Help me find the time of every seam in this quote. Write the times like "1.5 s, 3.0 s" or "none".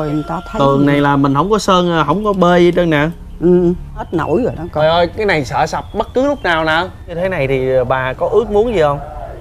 4.1 s, 7.2 s

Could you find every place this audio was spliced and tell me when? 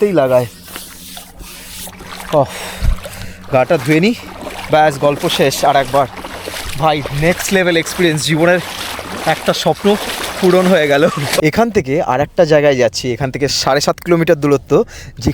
11.4 s

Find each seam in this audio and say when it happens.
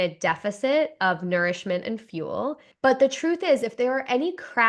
2.6 s

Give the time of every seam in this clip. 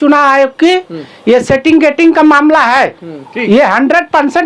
none

